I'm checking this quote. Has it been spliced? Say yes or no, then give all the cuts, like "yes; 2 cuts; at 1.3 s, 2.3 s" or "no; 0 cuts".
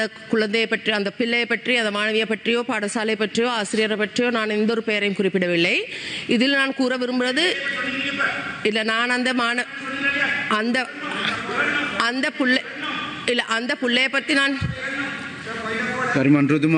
no; 0 cuts